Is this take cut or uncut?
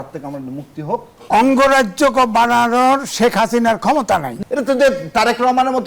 cut